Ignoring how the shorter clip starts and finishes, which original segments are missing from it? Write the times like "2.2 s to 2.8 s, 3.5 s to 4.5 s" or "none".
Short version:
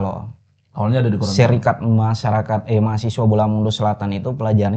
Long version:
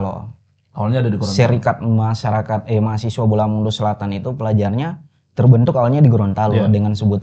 none